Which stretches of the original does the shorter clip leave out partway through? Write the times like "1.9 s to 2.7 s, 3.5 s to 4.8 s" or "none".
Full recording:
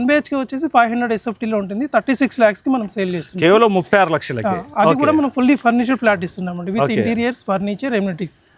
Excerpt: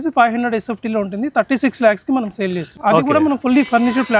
3.3 s to 4.6 s